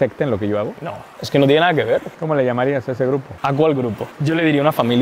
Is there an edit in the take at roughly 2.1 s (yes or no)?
yes